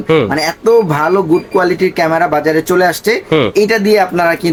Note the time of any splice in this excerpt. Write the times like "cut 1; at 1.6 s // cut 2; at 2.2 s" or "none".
none